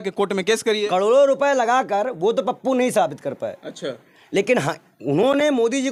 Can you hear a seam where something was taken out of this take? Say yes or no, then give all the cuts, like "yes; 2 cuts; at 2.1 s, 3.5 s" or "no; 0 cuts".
no; 0 cuts